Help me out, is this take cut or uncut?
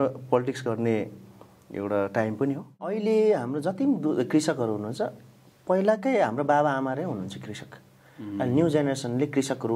cut